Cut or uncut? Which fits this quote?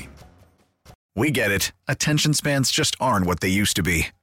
cut